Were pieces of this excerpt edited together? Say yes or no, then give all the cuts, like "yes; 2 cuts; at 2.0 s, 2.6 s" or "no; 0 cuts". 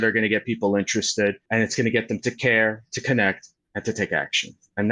yes; 1 cut; at 1.4 s